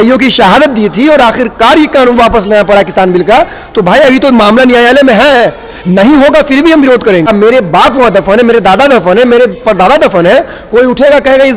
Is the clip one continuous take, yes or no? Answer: no